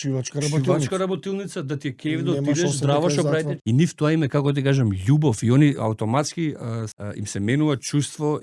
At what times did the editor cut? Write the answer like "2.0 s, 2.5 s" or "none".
3.6 s, 7.0 s